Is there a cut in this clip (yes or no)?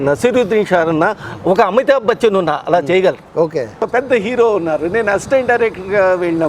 yes